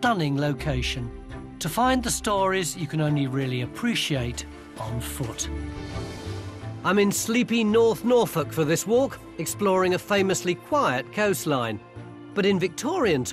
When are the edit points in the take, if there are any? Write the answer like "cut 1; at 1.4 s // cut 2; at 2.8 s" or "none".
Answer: none